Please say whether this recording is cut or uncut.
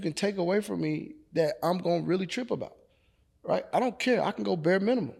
uncut